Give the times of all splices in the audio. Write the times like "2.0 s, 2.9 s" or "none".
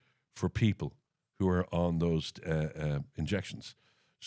none